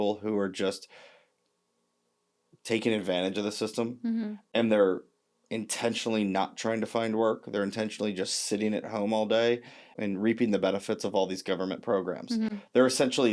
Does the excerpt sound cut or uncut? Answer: cut